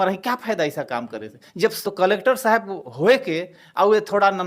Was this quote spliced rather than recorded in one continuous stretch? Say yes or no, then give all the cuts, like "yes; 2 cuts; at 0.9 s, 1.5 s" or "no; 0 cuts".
yes; 1 cut; at 1.8 s